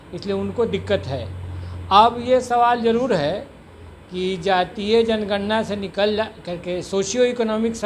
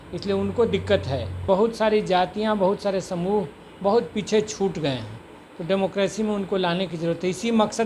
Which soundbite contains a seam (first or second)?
second